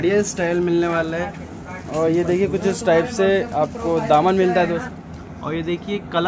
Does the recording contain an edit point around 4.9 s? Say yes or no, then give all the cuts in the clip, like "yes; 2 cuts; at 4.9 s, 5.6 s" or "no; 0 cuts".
yes; 1 cut; at 4.9 s